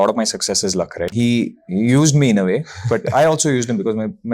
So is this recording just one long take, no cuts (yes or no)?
no